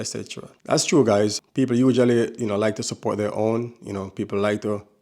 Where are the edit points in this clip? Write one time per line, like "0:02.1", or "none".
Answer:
0:01.4